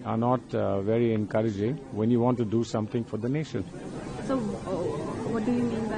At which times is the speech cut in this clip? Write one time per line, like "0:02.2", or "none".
none